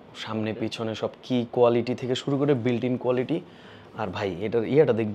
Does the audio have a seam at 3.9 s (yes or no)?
no